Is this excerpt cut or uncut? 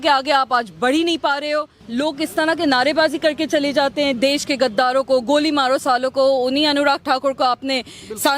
cut